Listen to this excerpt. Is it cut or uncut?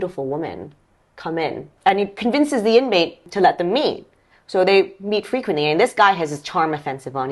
cut